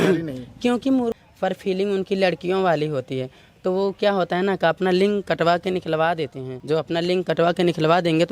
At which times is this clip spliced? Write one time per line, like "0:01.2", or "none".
0:01.2
0:06.5